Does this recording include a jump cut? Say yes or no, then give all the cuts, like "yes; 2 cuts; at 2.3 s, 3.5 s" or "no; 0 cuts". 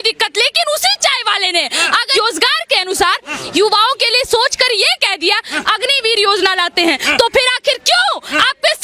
yes; 1 cut; at 2.1 s